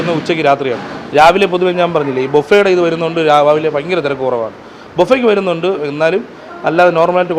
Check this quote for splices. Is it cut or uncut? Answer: uncut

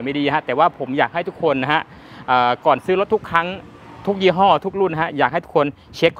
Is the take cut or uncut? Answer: uncut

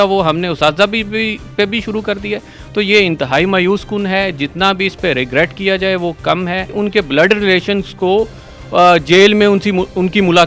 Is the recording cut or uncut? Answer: cut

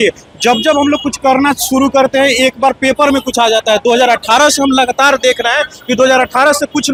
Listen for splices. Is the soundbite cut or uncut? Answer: uncut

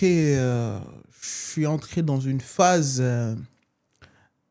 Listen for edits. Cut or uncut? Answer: uncut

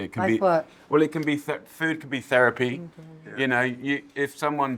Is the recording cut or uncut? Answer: uncut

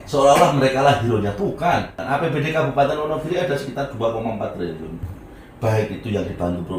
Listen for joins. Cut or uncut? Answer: cut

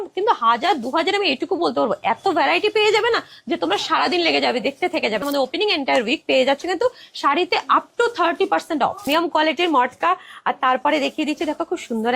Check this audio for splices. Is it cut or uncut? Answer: cut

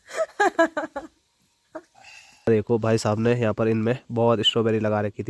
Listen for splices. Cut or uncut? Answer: cut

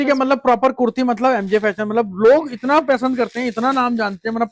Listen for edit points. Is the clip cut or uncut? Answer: uncut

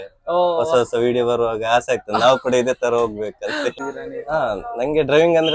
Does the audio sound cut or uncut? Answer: cut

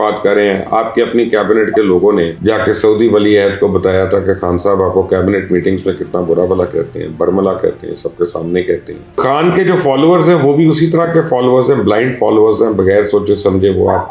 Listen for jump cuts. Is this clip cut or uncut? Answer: cut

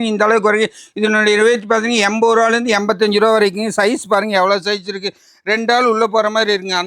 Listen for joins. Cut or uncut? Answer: uncut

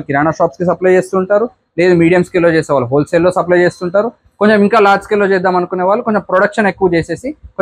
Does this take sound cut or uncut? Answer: uncut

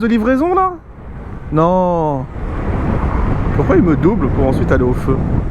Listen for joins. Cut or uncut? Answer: cut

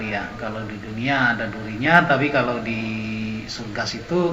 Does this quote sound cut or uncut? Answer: uncut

